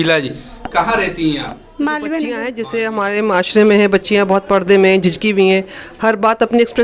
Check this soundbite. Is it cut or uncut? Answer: cut